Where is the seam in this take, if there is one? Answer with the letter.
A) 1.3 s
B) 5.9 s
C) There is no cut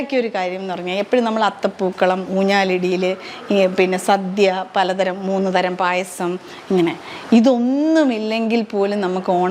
C